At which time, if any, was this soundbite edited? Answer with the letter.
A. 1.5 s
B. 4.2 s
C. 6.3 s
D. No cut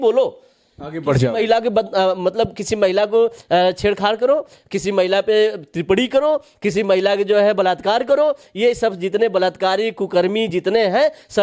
D